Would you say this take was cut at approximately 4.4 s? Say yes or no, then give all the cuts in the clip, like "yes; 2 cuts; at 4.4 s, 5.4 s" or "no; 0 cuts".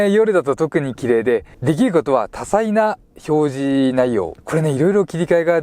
yes; 2 cuts; at 1.5 s, 4.4 s